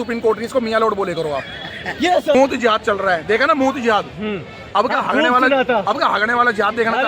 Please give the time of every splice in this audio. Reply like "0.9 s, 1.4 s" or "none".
2.3 s